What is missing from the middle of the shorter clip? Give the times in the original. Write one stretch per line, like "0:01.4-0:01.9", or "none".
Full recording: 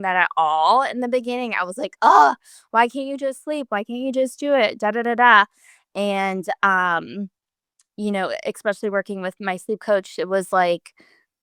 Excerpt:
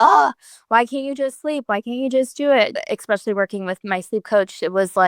0:04.8-0:08.3